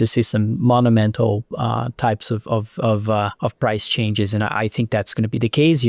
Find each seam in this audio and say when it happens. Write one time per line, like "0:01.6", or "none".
0:03.3